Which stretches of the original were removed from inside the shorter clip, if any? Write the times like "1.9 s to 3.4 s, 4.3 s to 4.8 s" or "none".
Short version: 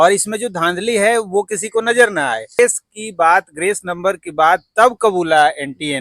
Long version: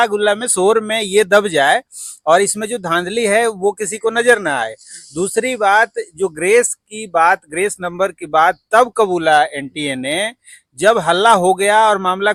4.9 s to 6.5 s